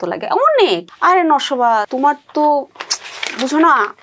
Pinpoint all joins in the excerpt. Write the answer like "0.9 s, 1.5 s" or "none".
0.8 s, 1.9 s